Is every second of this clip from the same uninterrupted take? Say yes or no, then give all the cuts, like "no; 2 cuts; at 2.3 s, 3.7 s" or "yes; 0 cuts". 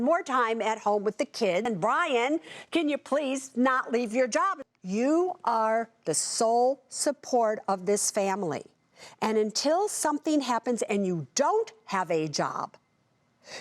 no; 2 cuts; at 1.6 s, 4.6 s